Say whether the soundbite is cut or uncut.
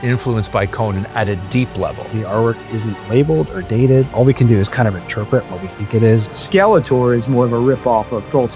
cut